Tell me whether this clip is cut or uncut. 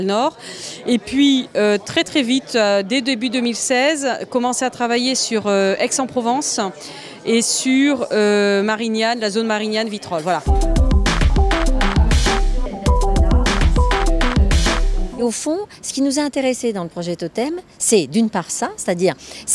uncut